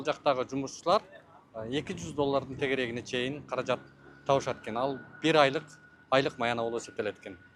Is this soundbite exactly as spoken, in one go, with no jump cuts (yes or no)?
yes